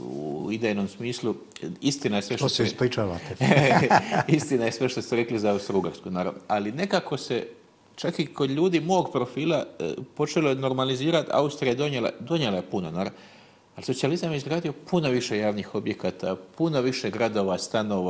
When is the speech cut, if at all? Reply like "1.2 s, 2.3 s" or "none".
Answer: none